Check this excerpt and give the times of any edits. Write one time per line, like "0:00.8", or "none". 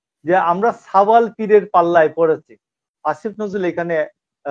0:02.8